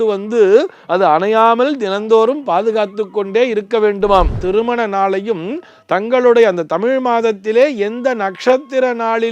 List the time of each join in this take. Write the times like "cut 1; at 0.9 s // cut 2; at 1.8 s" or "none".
cut 1; at 4.4 s